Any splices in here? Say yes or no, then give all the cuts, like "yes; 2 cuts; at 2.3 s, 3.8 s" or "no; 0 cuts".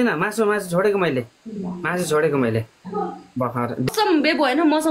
yes; 1 cut; at 3.9 s